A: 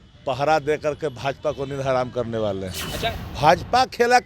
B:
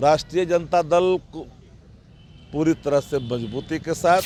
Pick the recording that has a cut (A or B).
A